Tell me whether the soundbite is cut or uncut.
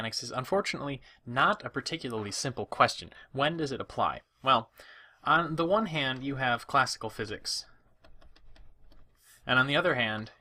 cut